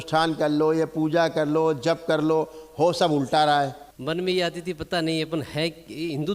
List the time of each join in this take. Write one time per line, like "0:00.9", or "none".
0:03.9